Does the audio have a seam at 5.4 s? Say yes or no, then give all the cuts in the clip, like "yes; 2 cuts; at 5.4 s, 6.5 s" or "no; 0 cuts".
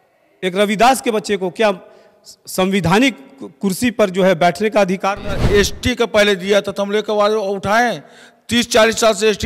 yes; 1 cut; at 5.4 s